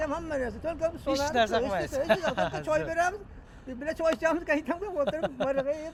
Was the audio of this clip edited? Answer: no; 0 cuts

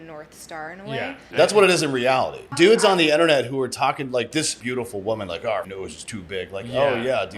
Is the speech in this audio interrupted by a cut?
yes; 4 cuts; at 1.2 s, 2.5 s, 4.6 s, 5.7 s

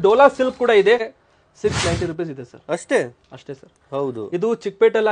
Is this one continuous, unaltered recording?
no; 1 cut; at 1.1 s

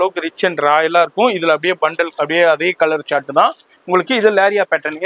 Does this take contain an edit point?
no; 0 cuts

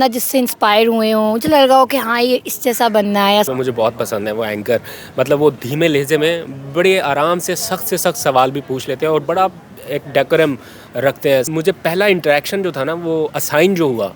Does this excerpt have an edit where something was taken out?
yes; 2 cuts; at 3.5 s, 11.5 s

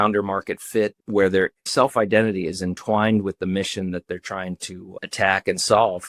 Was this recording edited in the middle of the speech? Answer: yes; 1 cut; at 1.0 s

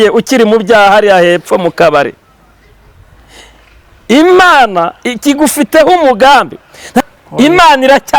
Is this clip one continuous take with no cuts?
no; 1 cut; at 7.0 s

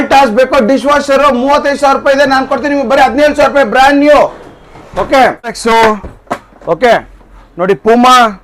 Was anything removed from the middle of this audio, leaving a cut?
yes; 1 cut; at 5.6 s

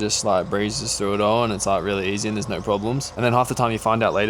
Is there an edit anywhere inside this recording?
yes; 1 cut; at 3.1 s

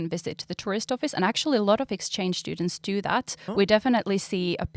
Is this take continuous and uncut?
yes; 0 cuts

